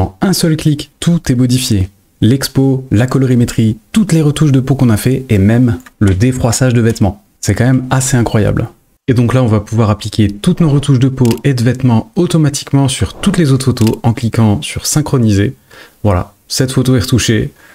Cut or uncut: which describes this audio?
cut